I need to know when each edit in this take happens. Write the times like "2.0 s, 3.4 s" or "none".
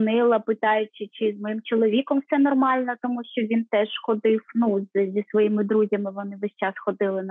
none

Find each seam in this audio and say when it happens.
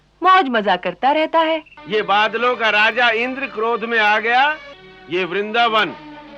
1.8 s, 5.0 s

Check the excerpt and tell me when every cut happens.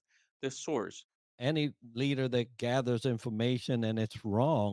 1.4 s

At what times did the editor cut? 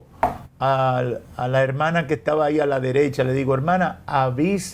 none

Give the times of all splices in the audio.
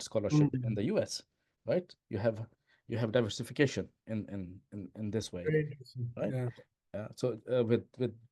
none

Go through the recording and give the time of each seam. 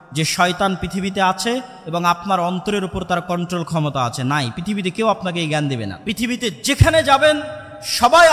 5.9 s

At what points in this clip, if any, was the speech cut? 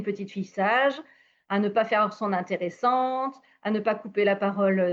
none

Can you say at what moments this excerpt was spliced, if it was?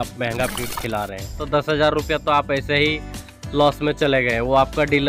1.4 s

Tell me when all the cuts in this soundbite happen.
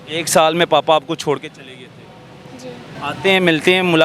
2.9 s

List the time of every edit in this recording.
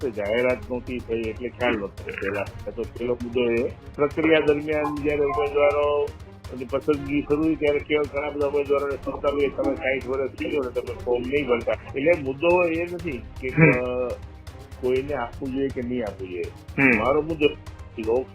3.8 s, 11.8 s

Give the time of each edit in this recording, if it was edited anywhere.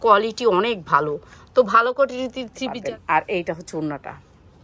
2.7 s

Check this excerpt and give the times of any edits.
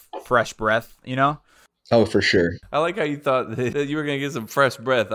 2.6 s, 3.7 s

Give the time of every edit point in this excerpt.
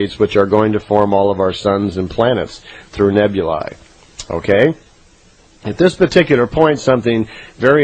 none

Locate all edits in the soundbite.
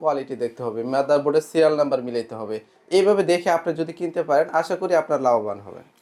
none

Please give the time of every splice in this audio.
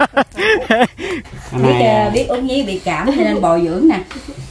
1.2 s

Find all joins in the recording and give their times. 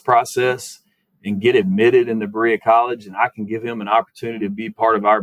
none

